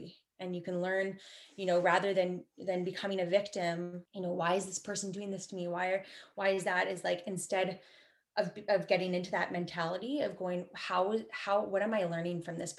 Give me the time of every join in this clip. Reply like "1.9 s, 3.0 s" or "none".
4.0 s